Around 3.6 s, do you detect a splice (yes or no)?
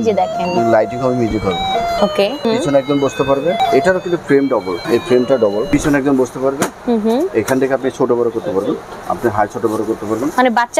yes